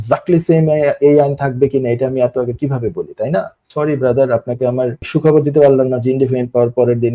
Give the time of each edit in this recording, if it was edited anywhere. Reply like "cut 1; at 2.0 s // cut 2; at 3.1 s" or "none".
cut 1; at 3.6 s // cut 2; at 5.0 s